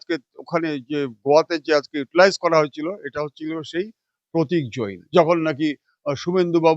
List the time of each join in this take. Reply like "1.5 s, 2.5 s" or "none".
5.0 s

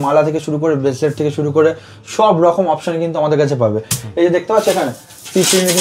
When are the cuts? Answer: none

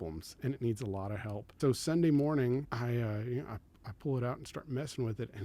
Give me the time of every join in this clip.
1.4 s, 2.7 s

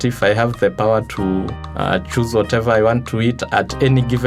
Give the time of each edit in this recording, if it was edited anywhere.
none

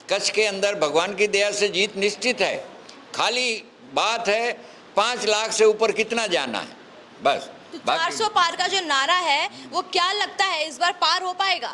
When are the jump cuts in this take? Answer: none

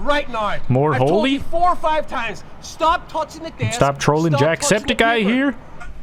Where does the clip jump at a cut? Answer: none

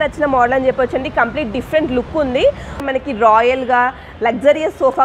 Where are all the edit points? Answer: 2.8 s

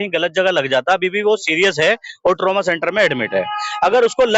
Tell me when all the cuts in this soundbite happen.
none

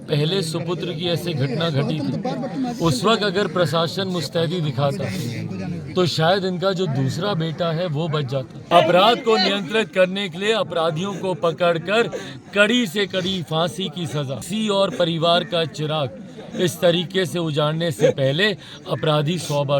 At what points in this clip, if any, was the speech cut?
8.7 s, 14.4 s

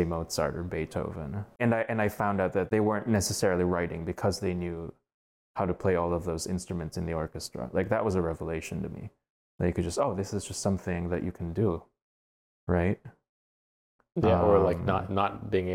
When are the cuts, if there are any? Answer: 1.6 s, 2.7 s

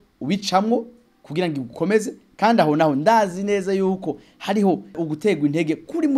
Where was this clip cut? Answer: 5.0 s

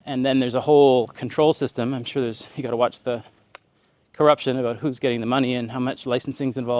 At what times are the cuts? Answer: none

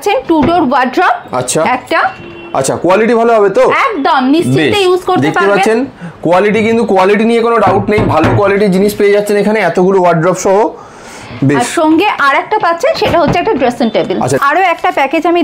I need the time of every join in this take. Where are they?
14.4 s

